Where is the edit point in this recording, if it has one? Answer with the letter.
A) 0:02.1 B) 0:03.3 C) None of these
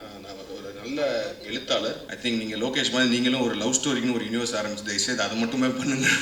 A